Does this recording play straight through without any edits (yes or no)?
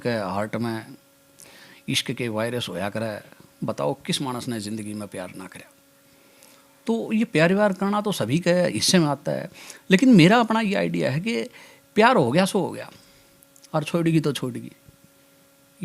yes